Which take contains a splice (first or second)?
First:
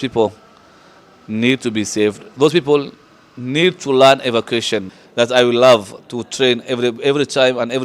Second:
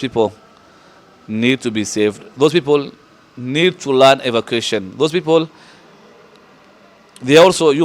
first